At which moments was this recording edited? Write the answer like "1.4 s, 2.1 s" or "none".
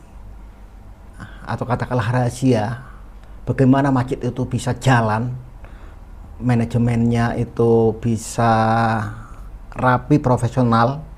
none